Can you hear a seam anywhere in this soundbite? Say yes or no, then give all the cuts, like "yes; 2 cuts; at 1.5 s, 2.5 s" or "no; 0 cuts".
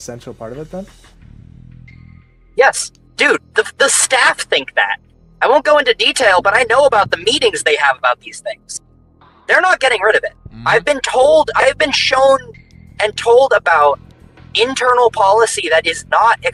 no; 0 cuts